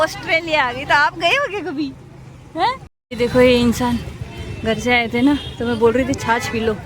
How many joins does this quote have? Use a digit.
1